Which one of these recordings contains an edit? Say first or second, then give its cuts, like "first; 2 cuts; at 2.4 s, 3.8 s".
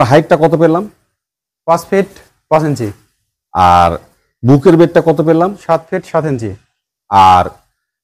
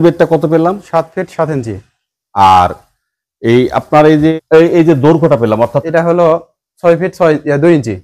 second; 2 cuts; at 4.3 s, 5.8 s